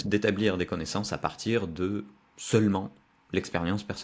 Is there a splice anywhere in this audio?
no; 0 cuts

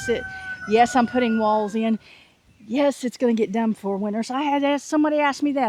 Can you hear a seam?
no; 0 cuts

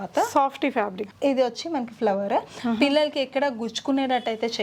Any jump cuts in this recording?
no; 0 cuts

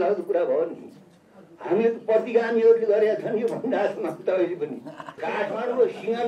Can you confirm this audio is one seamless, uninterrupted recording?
no; 1 cut; at 5.1 s

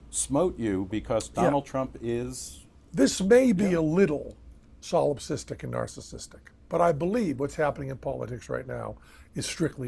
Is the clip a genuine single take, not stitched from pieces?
yes; 0 cuts

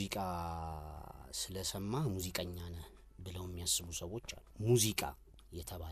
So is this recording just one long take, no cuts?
no; 1 cut; at 4.4 s

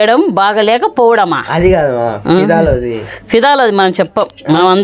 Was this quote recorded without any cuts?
yes; 0 cuts

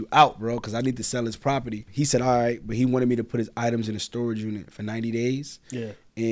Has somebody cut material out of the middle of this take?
yes; 1 cut; at 1.9 s

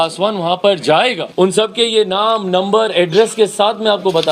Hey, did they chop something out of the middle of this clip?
yes; 1 cut; at 1.2 s

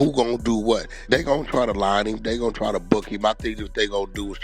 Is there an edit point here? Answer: yes; 1 cut; at 0.9 s

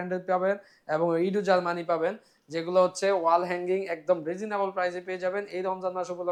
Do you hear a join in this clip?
no; 0 cuts

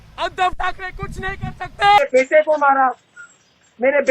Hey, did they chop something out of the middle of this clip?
yes; 1 cut; at 2.0 s

